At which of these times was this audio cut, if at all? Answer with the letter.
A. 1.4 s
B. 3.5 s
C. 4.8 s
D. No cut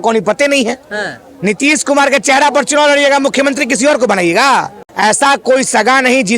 C